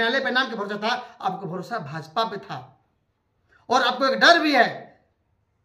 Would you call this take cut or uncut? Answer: uncut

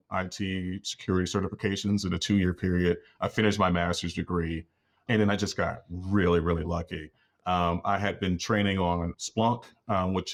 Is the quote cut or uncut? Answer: uncut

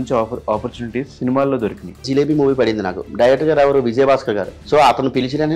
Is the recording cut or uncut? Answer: cut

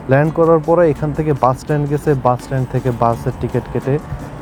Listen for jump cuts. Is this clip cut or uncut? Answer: uncut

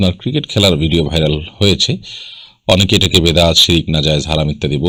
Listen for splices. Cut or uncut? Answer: uncut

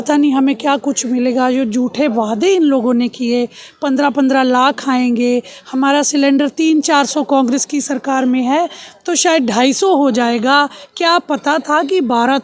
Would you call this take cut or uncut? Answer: uncut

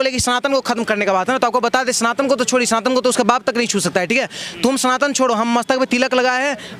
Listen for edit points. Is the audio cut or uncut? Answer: uncut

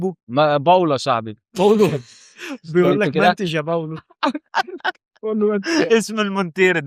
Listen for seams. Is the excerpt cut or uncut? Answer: uncut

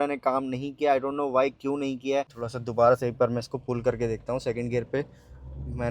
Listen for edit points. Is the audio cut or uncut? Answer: cut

